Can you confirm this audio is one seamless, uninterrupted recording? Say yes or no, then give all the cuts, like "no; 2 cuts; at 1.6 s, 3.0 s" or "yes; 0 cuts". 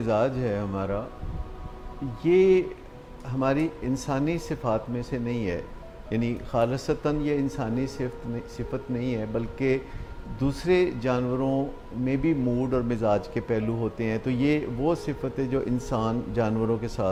yes; 0 cuts